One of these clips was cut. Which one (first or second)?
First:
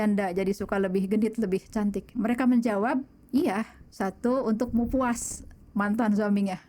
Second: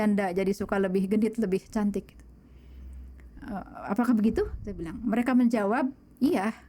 first